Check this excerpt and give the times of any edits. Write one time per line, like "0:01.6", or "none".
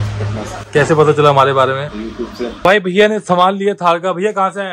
0:02.6